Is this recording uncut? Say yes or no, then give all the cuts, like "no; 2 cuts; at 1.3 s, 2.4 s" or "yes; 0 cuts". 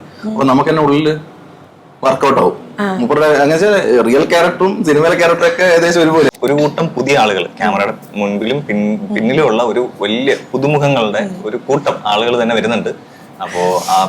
no; 1 cut; at 6.3 s